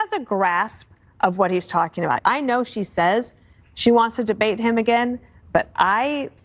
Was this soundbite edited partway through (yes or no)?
yes